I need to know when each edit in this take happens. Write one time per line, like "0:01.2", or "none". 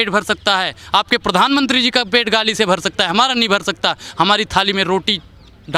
none

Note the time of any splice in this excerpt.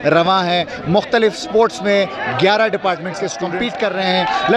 0:03.4

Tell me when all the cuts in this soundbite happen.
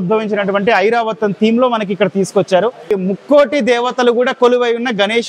0:02.9

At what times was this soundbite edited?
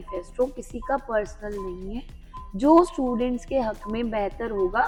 none

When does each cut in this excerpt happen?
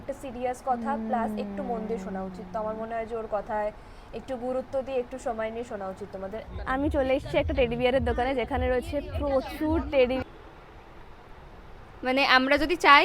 0:06.5
0:10.2

